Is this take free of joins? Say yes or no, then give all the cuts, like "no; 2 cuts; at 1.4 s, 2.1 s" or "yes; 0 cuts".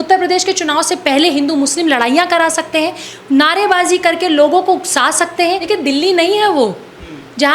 no; 1 cut; at 5.6 s